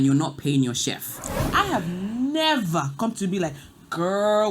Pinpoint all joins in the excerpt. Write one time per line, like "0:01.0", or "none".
0:01.4